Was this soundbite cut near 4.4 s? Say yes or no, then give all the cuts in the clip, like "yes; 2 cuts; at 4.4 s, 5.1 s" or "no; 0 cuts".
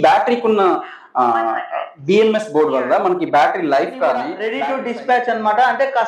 yes; 1 cut; at 4.4 s